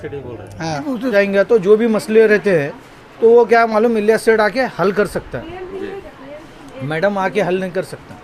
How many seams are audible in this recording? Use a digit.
1